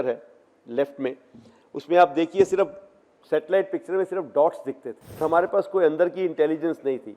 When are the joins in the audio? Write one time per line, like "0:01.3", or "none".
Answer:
0:05.2